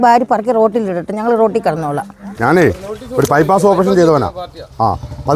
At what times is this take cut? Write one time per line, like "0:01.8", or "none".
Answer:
0:02.2